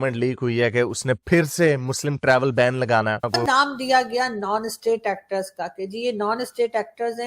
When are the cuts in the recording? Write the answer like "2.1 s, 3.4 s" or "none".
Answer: 3.3 s